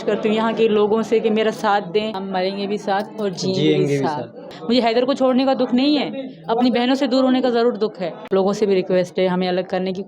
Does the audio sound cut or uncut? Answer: cut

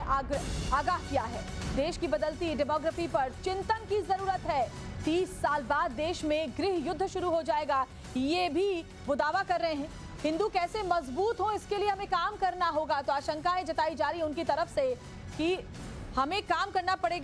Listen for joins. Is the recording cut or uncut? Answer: uncut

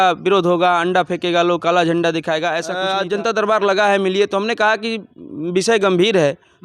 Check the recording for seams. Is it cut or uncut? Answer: cut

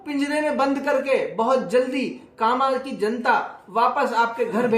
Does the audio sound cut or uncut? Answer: uncut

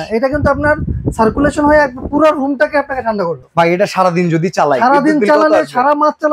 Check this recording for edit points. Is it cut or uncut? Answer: cut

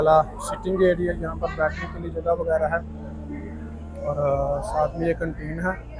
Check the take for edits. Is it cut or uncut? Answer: uncut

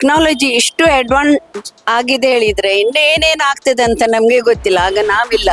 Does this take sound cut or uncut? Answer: uncut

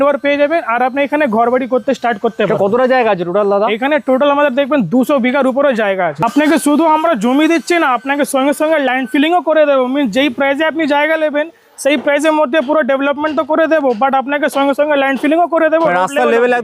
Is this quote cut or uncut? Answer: uncut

